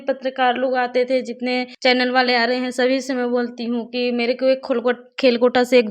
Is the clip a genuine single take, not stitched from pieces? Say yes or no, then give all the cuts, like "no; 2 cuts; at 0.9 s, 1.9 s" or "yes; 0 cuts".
no; 1 cut; at 1.7 s